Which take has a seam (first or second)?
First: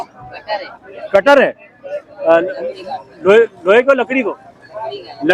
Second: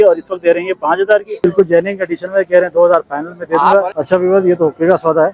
second